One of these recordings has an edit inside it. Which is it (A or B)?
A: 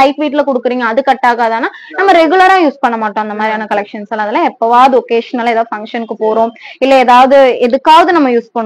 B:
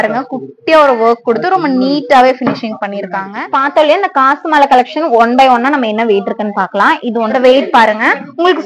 B